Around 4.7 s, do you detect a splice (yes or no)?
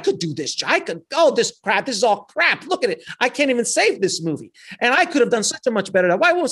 no